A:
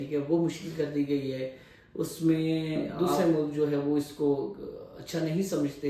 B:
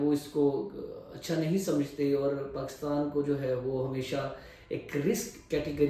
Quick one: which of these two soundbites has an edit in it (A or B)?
A